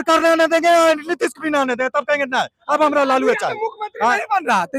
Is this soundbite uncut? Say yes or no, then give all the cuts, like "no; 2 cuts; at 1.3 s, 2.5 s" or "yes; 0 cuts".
yes; 0 cuts